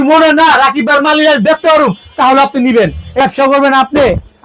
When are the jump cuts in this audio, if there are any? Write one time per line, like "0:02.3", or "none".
0:03.2